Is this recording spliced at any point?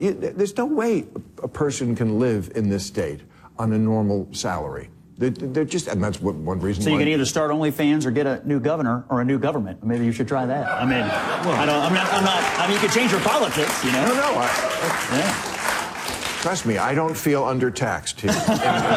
no; 0 cuts

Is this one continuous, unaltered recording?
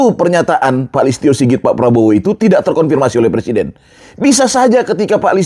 yes; 0 cuts

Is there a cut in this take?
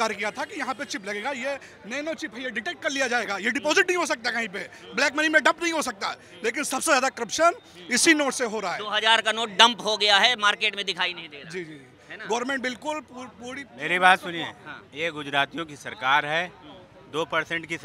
no; 0 cuts

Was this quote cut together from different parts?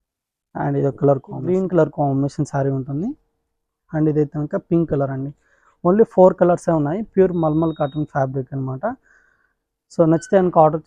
yes; 1 cut; at 1.3 s

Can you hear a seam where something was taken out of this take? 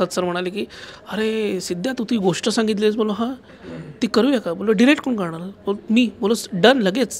no; 0 cuts

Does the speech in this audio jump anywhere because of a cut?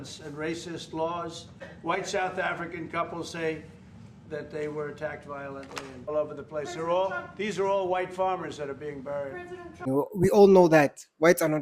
yes; 3 cuts; at 1.7 s, 6.1 s, 9.9 s

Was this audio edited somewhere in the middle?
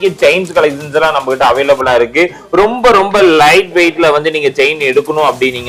no; 0 cuts

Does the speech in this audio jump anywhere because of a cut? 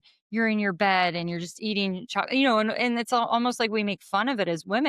no; 0 cuts

